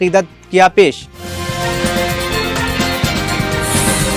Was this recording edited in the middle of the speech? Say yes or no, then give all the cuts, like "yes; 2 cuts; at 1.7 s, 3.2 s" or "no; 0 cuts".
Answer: no; 0 cuts